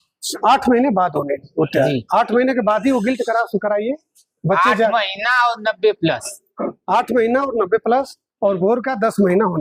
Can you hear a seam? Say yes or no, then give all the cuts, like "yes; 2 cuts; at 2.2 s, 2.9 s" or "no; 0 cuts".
no; 0 cuts